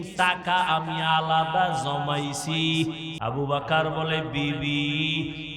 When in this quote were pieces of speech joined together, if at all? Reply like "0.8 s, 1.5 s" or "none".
3.1 s